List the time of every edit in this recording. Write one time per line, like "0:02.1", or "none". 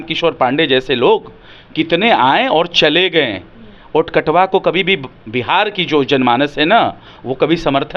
none